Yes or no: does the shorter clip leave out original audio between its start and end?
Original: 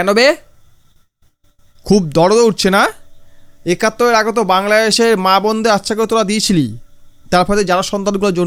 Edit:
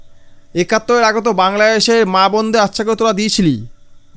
no